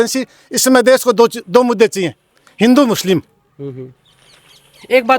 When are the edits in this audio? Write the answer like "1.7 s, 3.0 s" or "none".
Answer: none